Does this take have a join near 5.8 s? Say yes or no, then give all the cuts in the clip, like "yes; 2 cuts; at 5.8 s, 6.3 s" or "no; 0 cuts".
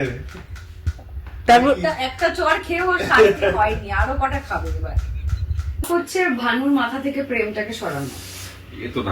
yes; 1 cut; at 5.8 s